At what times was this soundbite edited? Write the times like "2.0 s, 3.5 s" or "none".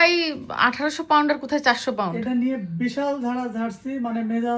none